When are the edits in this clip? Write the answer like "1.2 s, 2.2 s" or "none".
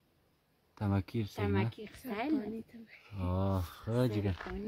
none